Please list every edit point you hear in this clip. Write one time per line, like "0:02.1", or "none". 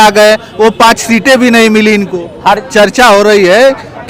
0:02.6